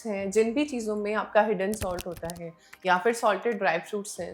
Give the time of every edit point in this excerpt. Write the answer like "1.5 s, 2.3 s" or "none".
none